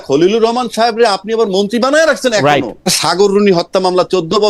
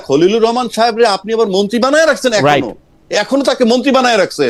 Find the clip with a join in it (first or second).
first